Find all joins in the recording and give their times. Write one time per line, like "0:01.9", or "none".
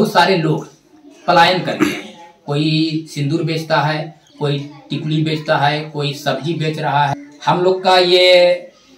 0:07.3